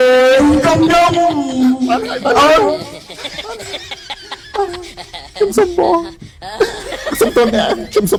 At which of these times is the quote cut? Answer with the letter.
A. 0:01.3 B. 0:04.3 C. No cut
C